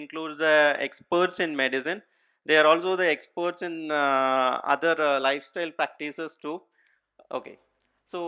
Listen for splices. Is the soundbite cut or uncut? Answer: uncut